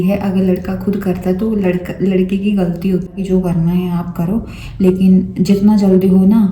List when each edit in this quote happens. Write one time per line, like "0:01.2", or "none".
0:03.1

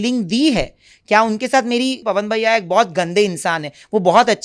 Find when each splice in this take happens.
0:02.0

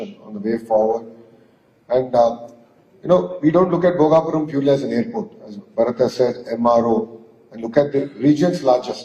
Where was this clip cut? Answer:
0:05.2

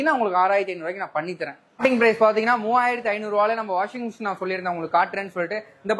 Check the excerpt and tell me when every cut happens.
0:01.8

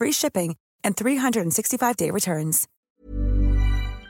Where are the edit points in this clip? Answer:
0:02.9

